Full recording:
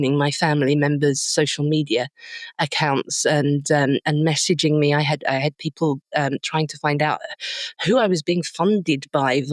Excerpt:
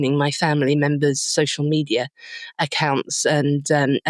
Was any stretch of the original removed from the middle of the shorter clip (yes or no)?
no